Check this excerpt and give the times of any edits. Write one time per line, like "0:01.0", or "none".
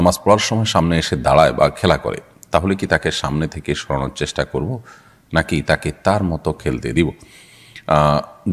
none

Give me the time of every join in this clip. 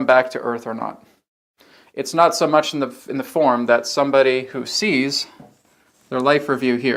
none

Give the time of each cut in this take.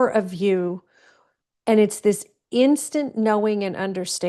none

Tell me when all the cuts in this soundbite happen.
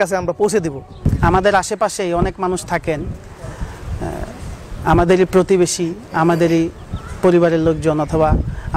0:01.1

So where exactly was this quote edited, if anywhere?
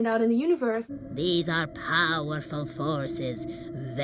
0:01.0

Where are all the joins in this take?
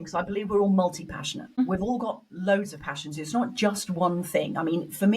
0:01.6

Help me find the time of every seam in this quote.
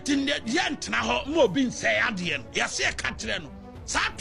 none

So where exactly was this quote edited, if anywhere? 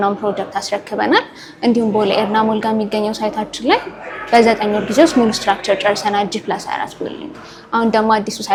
none

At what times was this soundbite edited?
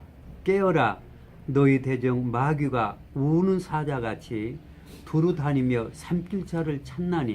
0:05.0

